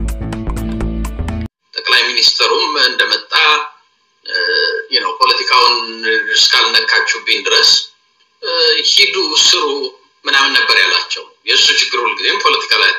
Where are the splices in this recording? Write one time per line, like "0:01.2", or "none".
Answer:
0:01.5

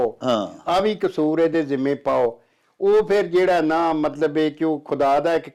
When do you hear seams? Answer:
none

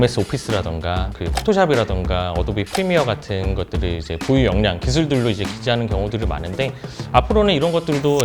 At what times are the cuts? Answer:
0:01.1

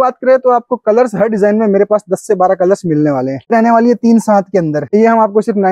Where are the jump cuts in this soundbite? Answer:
0:03.5
0:04.9

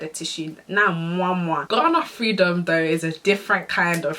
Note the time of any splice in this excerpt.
0:01.6

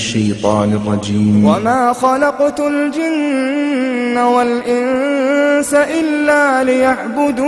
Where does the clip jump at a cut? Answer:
0:01.6

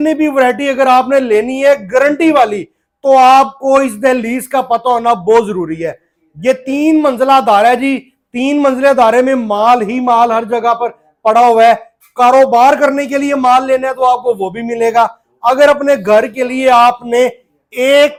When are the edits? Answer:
none

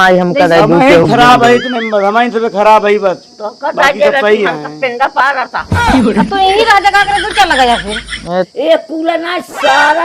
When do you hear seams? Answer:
0:08.5

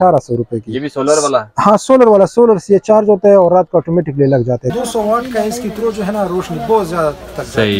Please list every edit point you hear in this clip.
0:04.7

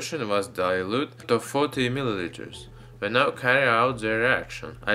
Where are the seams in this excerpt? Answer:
0:01.0

